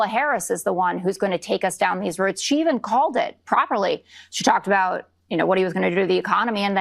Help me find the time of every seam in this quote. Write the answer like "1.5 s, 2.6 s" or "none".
none